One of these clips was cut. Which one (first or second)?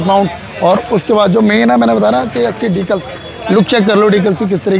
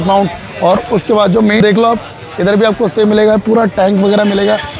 second